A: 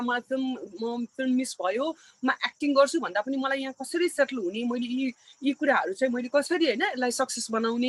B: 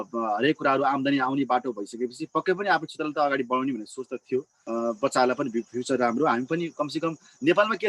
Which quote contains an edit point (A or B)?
B